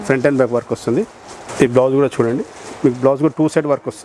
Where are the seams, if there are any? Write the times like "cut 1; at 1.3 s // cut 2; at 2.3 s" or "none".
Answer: none